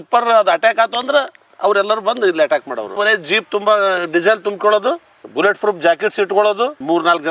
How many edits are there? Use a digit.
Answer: 1